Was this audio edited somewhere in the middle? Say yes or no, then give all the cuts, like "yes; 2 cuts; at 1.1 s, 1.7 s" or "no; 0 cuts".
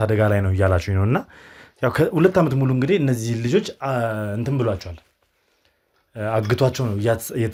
no; 0 cuts